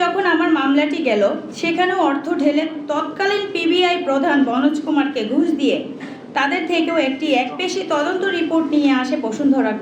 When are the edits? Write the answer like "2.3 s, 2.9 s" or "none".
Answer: none